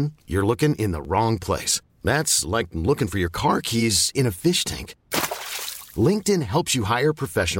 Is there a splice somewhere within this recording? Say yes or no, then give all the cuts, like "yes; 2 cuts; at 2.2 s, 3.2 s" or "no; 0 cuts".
no; 0 cuts